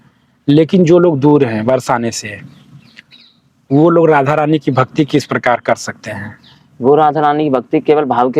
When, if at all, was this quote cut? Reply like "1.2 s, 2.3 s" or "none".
none